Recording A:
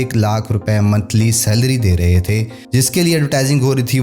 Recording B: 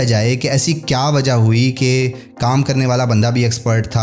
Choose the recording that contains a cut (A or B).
A